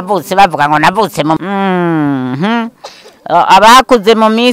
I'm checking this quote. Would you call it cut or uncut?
cut